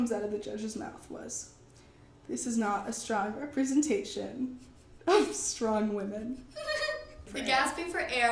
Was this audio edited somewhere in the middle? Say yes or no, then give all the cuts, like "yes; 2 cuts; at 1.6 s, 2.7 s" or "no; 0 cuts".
yes; 1 cut; at 7.3 s